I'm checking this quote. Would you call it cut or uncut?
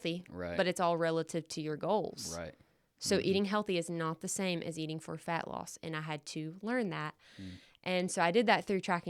uncut